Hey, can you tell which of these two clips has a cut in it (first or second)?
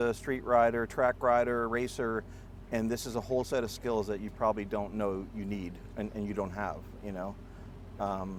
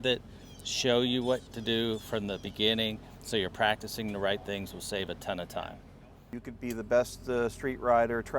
second